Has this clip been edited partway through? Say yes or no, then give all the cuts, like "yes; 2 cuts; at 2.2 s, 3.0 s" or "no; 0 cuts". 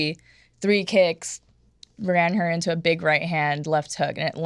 no; 0 cuts